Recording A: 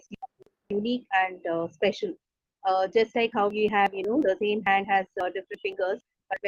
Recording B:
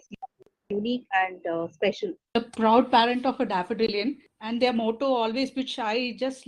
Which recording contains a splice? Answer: B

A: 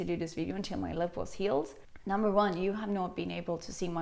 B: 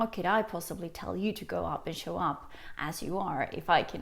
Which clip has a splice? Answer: A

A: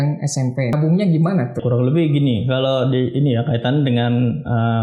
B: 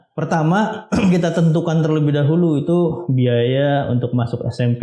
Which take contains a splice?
A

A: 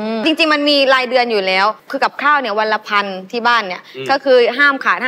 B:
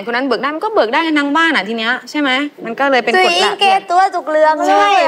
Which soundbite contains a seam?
A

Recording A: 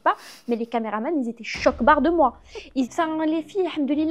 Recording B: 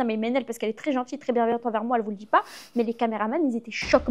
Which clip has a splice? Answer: A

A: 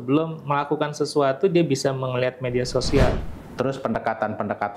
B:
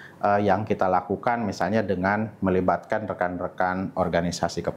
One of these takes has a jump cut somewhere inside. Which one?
A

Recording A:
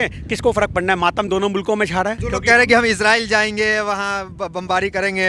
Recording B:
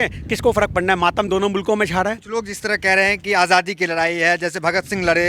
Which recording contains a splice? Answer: A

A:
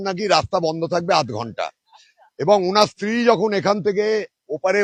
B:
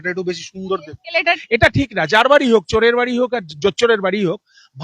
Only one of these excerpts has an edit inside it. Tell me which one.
B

